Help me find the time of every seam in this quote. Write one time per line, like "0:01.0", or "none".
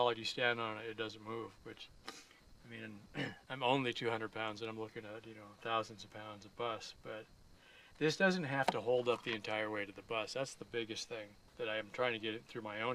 none

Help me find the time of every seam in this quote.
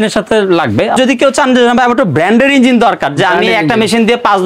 0:00.9

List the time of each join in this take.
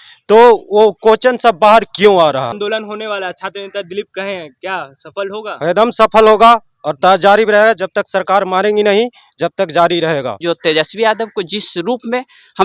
0:02.6
0:10.3

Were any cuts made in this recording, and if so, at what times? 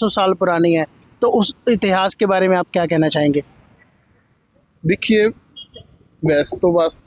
none

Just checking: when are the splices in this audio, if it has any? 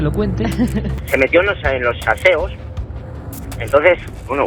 0:01.0

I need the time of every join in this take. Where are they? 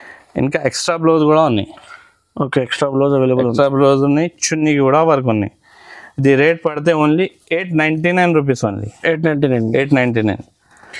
none

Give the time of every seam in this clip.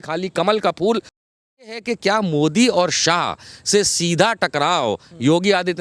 0:01.9

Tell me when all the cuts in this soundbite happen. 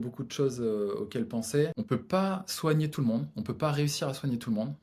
0:01.7

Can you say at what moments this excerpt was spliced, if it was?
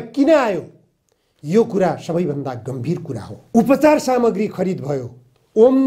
0:03.3

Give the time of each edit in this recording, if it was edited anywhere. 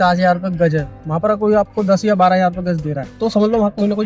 0:03.0

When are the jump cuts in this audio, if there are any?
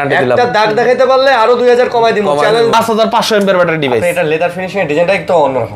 0:02.7

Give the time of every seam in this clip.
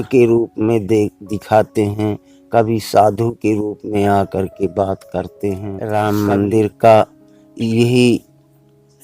0:05.7

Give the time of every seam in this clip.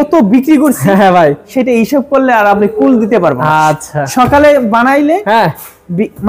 none

